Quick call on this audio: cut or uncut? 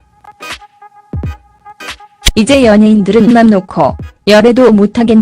cut